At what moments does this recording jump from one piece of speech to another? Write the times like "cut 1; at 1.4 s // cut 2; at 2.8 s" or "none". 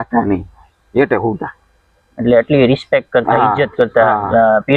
none